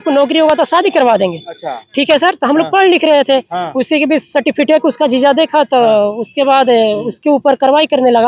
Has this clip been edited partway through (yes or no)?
no